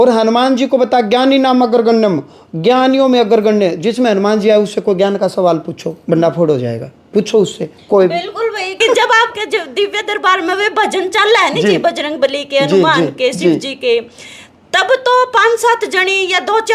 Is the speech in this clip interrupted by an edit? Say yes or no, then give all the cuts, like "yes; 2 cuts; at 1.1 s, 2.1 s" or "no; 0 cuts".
yes; 1 cut; at 8.8 s